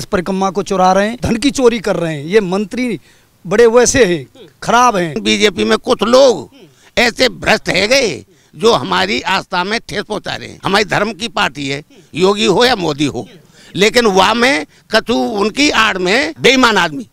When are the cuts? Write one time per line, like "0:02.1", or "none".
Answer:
0:01.2
0:05.2
0:10.4
0:16.3